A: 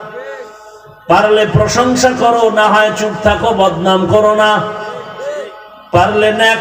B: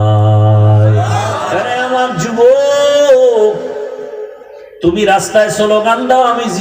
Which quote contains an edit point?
B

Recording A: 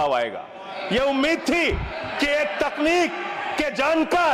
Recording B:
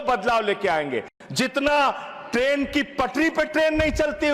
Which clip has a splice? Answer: B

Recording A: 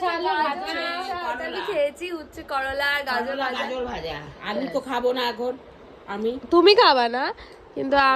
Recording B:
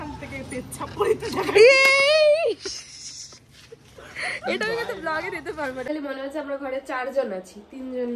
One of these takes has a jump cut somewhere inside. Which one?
B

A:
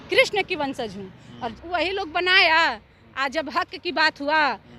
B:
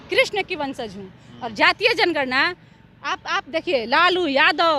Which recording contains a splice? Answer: A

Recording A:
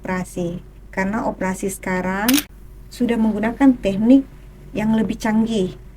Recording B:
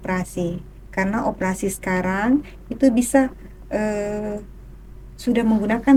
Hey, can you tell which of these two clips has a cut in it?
A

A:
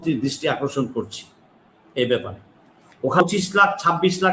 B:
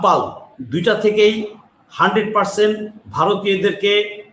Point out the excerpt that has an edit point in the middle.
A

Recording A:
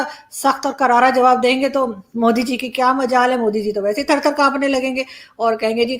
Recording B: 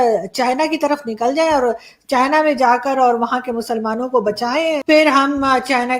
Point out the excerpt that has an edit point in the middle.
B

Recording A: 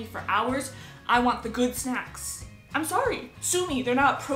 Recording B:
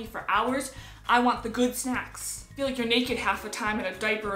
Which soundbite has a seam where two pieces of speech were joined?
B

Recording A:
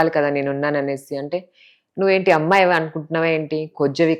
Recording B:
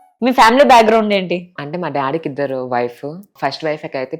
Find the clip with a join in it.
B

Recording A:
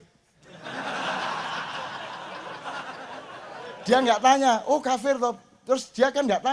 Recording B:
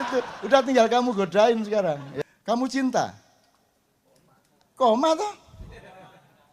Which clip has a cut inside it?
B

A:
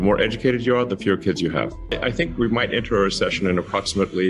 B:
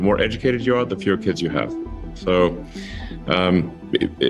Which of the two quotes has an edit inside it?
A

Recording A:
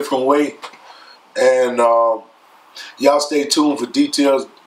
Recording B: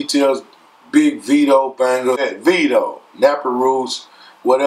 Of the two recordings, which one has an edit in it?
B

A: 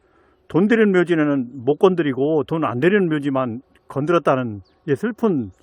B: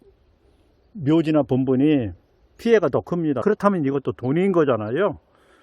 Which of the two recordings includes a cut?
B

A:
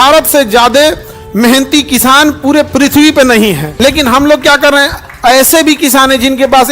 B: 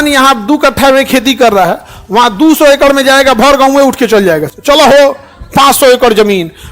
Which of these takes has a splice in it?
A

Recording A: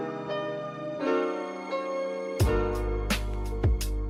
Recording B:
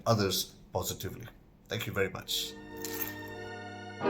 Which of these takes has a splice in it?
B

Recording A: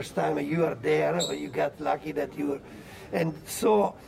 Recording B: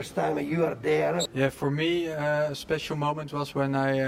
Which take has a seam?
B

